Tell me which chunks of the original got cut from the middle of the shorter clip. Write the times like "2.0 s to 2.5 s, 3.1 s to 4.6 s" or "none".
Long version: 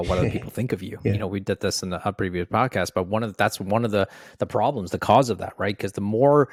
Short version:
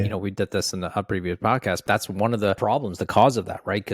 2.9 s to 3.3 s, 4.1 s to 4.5 s